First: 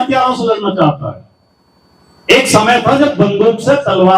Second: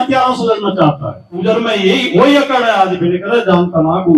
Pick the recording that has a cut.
second; 1 cut; at 1.4 s

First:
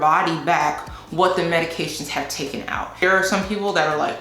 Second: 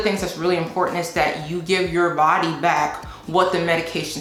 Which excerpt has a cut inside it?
first; 1 cut; at 3.0 s

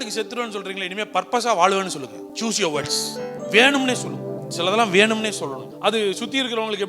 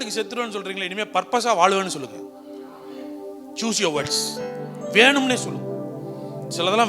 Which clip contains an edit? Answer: first; 4 cuts; at 2.3 s, 3.4 s, 4.4 s, 5.7 s

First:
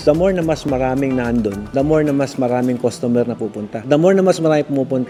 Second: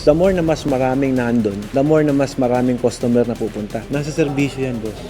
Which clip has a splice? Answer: second; 1 cut; at 3.8 s

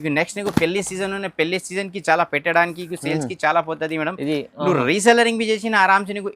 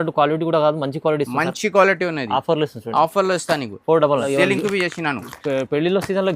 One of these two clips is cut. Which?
second; 1 cut; at 4.3 s

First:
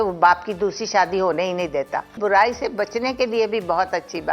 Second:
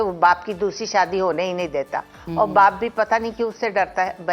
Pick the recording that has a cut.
first; 1 cut; at 2.2 s

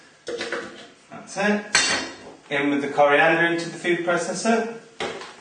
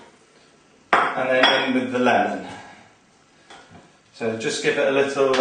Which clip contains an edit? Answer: second; 1 cut; at 1.4 s

